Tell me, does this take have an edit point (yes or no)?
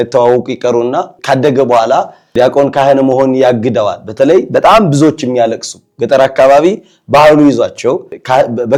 no